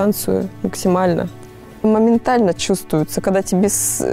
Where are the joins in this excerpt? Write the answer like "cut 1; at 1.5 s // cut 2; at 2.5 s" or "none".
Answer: cut 1; at 1.8 s